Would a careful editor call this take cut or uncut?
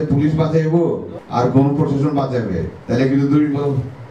cut